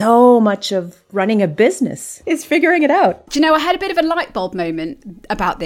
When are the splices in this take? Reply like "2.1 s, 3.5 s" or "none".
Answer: 1.0 s, 2.1 s, 3.3 s